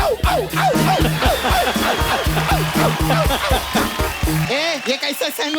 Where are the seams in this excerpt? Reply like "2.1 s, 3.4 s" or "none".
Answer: 4.5 s